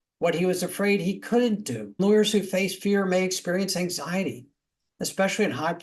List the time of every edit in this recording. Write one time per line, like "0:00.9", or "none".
0:02.0

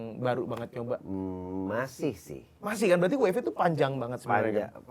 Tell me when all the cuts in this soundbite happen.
none

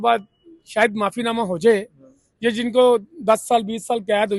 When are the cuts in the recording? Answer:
none

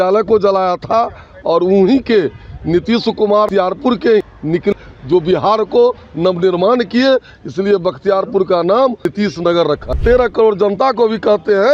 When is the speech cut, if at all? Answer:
0:10.0

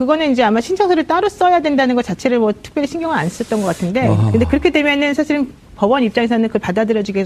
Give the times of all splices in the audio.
0:03.8

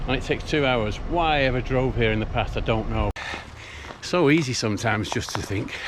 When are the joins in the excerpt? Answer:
0:03.3

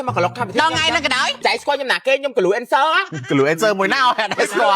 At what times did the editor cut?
0:01.3
0:03.1

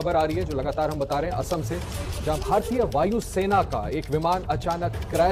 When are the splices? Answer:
none

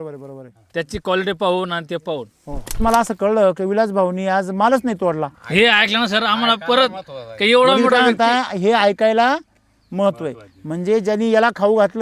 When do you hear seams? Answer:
0:02.8
0:05.4

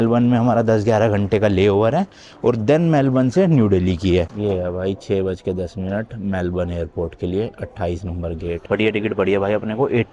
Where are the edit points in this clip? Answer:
0:04.3
0:08.6

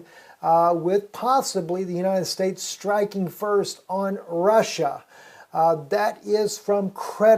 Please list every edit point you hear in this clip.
0:05.2

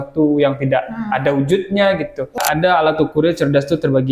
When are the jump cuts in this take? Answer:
0:02.4

